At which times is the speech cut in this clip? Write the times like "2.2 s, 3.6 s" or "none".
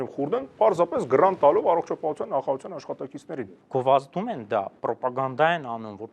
3.6 s